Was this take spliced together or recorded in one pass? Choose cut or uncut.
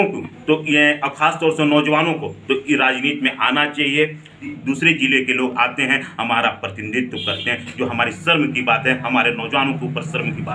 cut